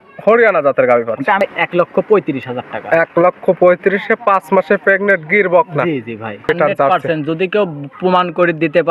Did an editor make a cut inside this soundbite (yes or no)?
yes